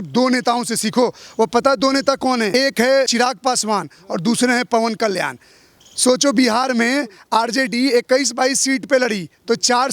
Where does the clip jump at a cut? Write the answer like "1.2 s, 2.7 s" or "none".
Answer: 3.0 s